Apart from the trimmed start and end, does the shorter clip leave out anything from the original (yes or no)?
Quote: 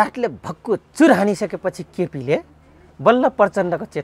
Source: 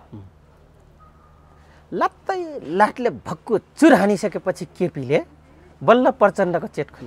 no